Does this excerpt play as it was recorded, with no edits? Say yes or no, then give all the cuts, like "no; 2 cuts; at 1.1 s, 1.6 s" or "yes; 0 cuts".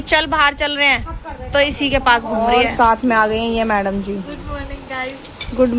no; 1 cut; at 2.6 s